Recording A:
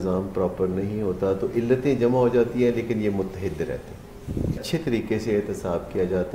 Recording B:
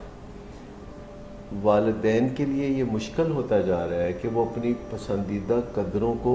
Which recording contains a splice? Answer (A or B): A